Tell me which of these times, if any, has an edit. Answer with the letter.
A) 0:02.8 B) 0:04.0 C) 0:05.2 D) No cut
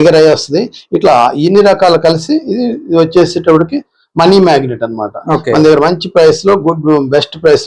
D